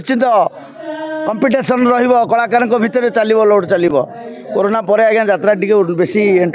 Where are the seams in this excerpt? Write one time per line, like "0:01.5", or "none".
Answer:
none